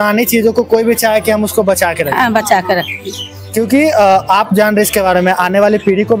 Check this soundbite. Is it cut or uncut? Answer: uncut